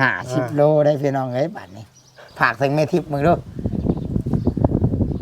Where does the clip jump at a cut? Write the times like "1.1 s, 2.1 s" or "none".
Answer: 2.3 s

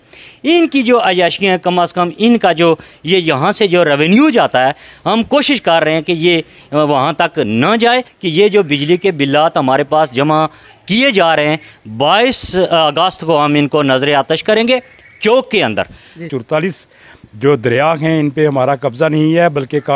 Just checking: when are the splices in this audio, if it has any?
8.1 s, 16.2 s

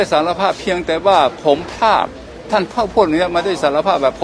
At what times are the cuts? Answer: none

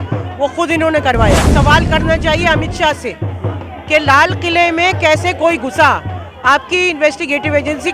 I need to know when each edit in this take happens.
1.5 s

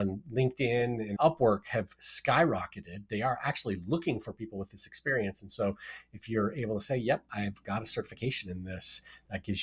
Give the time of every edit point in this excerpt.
1.1 s

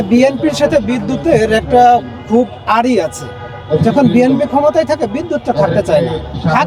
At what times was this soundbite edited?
none

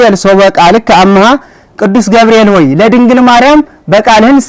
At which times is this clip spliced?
none

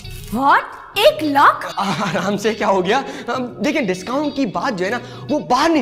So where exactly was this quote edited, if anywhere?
none

